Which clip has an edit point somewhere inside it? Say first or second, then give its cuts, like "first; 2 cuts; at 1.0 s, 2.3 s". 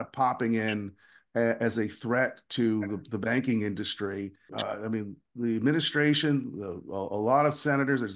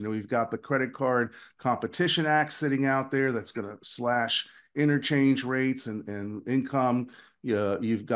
first; 1 cut; at 4.5 s